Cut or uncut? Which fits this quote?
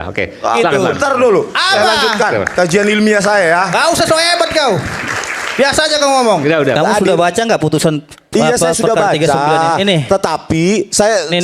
cut